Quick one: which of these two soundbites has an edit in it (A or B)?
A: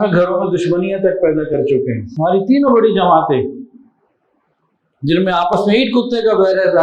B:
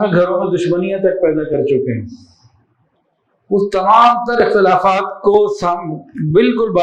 A